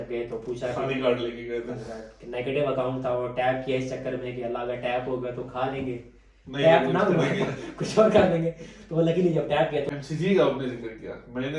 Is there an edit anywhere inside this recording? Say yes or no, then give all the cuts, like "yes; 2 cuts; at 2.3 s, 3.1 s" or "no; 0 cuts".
yes; 1 cut; at 9.9 s